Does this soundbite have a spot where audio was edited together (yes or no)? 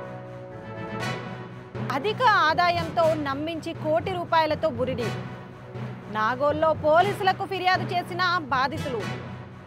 yes